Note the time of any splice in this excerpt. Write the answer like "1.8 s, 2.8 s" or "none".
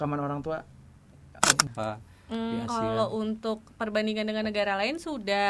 1.6 s